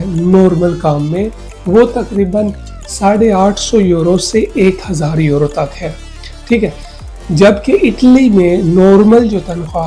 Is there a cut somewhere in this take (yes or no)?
no